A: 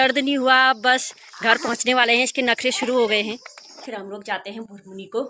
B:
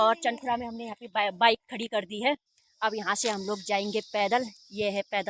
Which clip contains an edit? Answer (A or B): A